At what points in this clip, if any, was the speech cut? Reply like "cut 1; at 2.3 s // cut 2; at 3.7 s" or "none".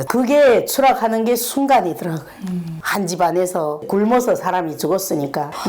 cut 1; at 2.7 s

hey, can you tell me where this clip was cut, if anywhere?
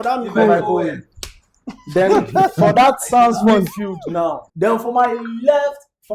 cut 1; at 4.4 s

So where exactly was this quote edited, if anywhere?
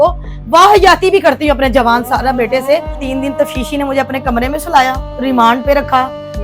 cut 1; at 3.0 s

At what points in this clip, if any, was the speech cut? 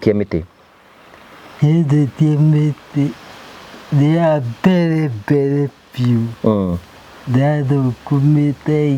none

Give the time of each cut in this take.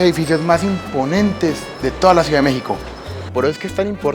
cut 1; at 3.2 s

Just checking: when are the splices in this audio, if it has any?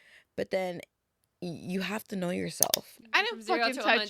cut 1; at 3.0 s

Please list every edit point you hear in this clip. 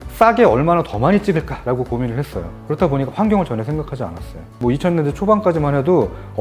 cut 1; at 4.5 s

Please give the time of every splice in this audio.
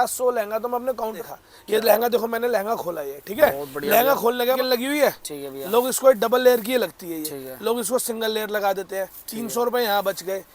cut 1; at 1.2 s // cut 2; at 4.6 s

